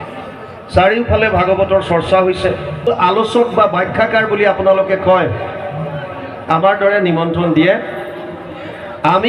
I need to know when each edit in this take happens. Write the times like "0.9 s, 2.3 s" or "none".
2.9 s